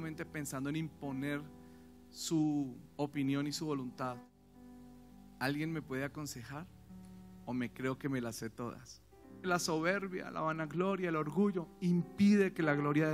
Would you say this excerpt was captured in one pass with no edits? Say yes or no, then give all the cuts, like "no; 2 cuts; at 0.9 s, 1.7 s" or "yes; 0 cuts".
no; 2 cuts; at 4.3 s, 9.5 s